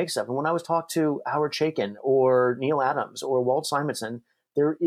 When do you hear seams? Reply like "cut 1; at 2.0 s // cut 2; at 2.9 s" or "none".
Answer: none